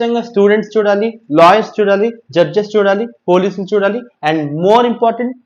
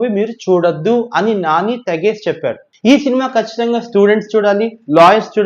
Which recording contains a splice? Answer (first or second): second